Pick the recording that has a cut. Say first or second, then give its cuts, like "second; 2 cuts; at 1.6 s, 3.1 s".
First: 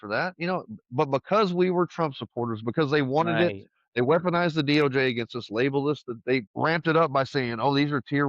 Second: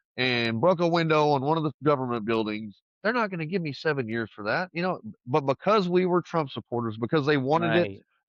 first; 1 cut; at 6.5 s